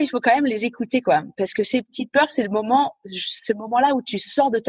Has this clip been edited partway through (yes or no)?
no